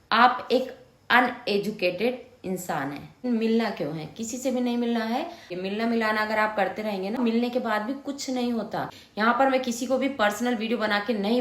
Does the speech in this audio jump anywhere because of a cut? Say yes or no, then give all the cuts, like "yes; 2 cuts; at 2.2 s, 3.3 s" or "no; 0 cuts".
yes; 4 cuts; at 3.2 s, 5.5 s, 7.2 s, 9.0 s